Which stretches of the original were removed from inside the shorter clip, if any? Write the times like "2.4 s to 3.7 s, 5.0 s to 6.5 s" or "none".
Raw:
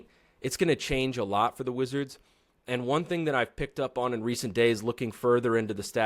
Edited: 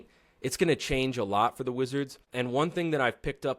2.2 s to 2.5 s